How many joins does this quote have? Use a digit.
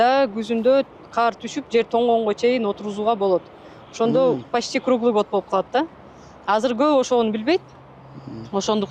0